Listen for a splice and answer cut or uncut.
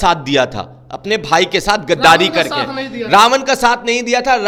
uncut